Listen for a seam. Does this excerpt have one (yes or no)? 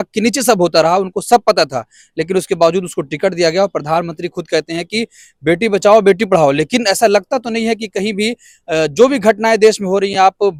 no